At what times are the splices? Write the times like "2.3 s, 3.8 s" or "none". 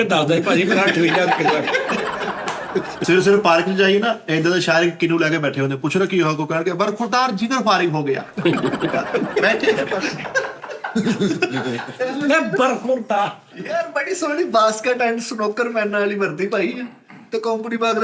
3.0 s, 13.4 s